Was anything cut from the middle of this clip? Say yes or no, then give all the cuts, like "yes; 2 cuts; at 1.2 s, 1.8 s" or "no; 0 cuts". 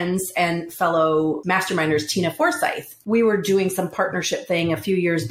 yes; 2 cuts; at 1.4 s, 2.9 s